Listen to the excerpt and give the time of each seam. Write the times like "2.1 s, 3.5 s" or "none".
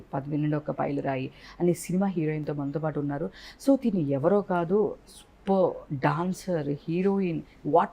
none